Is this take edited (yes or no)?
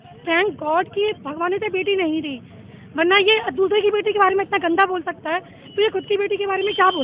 no